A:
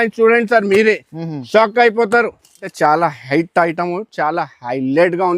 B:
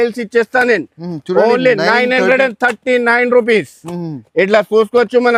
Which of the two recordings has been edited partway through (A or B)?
A